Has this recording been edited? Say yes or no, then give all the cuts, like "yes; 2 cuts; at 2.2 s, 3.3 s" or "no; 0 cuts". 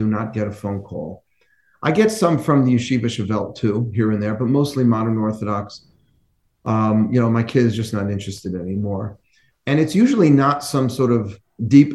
no; 0 cuts